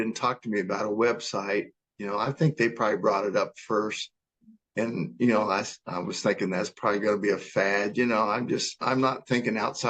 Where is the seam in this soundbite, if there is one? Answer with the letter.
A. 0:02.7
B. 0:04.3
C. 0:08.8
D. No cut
C